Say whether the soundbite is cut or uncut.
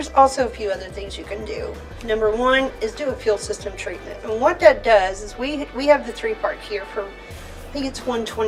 uncut